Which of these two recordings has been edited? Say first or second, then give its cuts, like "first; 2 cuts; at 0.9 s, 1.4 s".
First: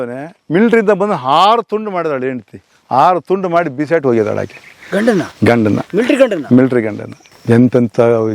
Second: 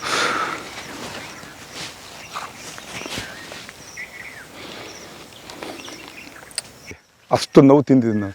second; 1 cut; at 6.7 s